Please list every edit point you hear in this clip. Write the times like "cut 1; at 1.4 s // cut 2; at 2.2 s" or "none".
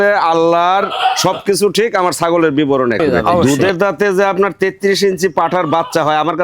cut 1; at 3.4 s